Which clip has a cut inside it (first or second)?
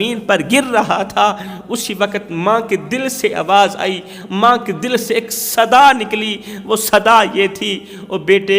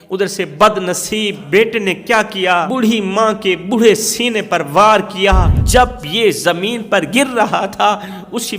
second